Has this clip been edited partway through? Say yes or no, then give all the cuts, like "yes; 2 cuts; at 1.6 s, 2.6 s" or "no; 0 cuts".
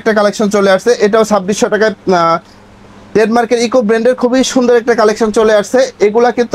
no; 0 cuts